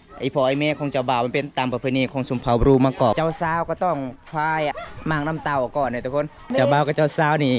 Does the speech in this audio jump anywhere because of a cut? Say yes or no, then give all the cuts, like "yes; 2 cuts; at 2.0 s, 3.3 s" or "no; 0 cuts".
yes; 3 cuts; at 3.1 s, 4.8 s, 6.4 s